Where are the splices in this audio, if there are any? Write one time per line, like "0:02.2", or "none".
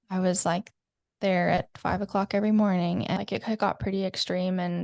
0:03.2